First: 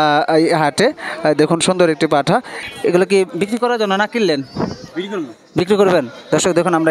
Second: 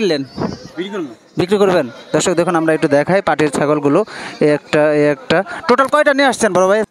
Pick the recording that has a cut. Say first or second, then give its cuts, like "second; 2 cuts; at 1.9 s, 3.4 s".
first; 1 cut; at 2.5 s